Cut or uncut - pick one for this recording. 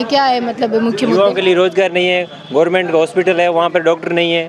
uncut